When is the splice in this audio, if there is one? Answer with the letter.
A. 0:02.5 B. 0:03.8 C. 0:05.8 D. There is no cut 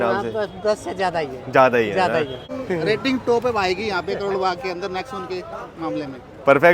A